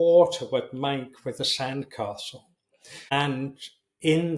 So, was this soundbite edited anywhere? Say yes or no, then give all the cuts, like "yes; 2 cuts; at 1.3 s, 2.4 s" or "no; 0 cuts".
yes; 1 cut; at 3.1 s